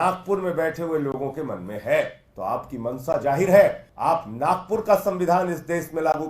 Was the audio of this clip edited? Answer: yes; 2 cuts; at 2.2 s, 3.9 s

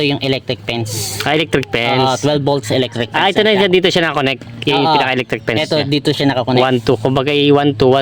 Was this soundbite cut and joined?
no; 0 cuts

